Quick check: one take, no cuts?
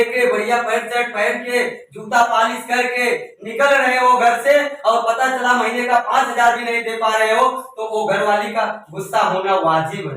yes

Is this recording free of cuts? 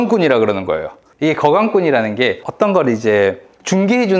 no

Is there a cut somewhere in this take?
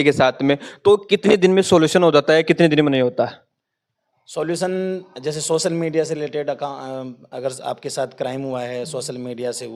no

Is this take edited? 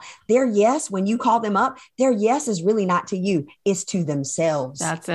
no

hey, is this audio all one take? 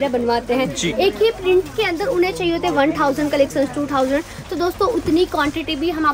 yes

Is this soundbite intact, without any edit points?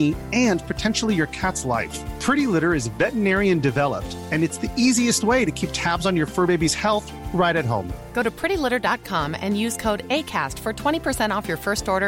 yes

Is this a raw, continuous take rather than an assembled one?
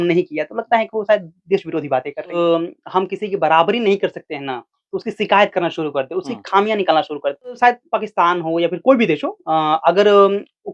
no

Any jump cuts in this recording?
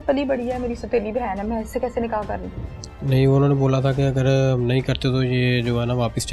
no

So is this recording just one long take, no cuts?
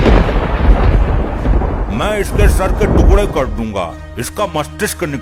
yes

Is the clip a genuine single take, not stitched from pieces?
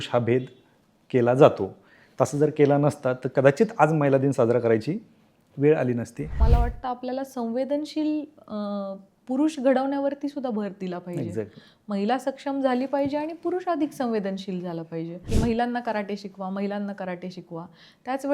no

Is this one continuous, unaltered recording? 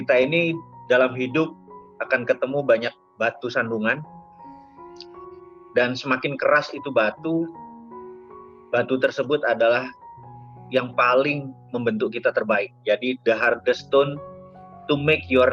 yes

